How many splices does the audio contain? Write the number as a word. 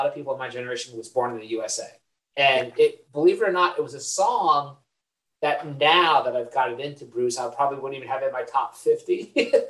zero